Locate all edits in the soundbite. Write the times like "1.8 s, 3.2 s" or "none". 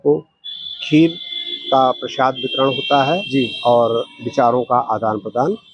none